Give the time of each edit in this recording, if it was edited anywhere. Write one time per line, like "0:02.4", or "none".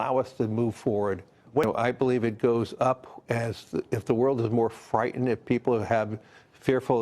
0:01.6